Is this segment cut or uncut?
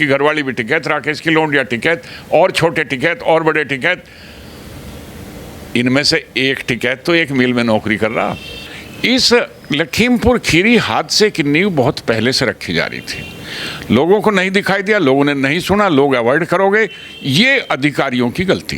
cut